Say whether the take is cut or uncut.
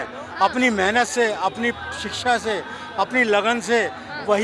uncut